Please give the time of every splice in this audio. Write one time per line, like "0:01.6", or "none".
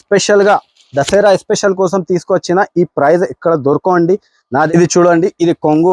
0:04.7